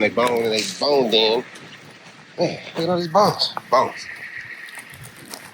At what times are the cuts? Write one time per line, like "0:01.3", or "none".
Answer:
none